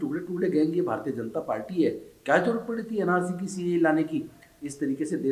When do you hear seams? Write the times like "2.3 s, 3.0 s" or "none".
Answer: none